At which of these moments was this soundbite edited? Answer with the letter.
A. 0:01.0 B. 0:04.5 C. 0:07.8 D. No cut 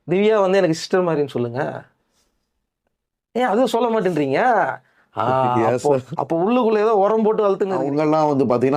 C